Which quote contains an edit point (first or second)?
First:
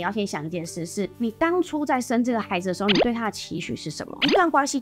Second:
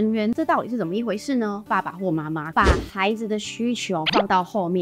second